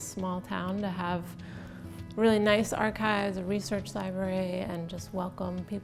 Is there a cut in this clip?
no; 0 cuts

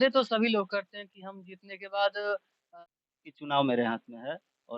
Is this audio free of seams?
no; 1 cut; at 2.6 s

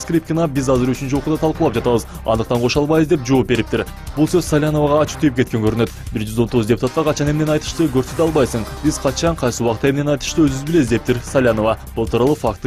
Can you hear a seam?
no; 0 cuts

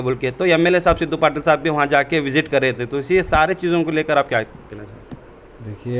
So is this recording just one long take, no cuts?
yes; 0 cuts

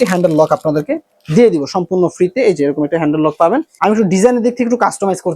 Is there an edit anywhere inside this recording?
yes; 1 cut; at 3.7 s

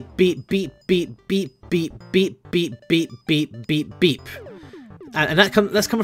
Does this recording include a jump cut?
yes; 1 cut; at 1.8 s

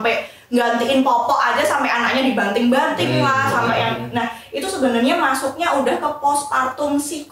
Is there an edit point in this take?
no; 0 cuts

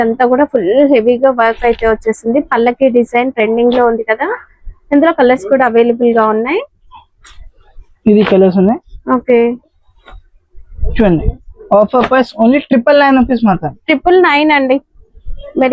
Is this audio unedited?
yes; 0 cuts

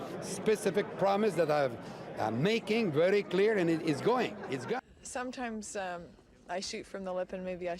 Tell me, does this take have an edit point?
yes; 1 cut; at 4.8 s

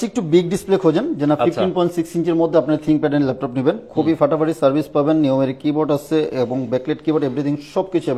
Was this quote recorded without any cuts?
yes; 0 cuts

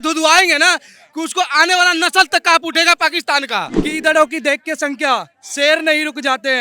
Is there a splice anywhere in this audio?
yes; 1 cut; at 3.8 s

